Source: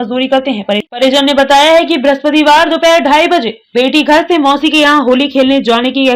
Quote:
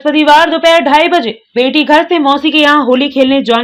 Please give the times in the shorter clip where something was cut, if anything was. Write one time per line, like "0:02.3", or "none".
none

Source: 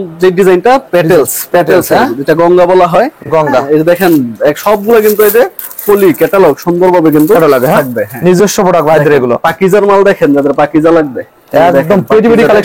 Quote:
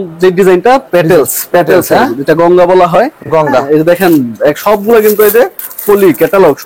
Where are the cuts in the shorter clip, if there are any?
none

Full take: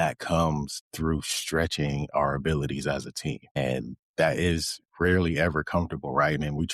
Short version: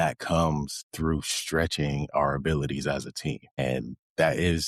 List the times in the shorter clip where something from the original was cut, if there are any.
none

